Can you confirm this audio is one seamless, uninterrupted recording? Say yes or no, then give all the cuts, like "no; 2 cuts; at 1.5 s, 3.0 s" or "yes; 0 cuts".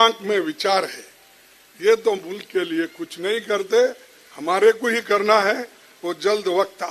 yes; 0 cuts